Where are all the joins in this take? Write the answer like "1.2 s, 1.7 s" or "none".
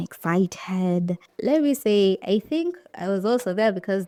none